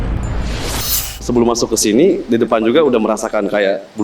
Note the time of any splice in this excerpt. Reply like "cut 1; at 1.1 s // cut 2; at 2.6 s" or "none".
cut 1; at 1.2 s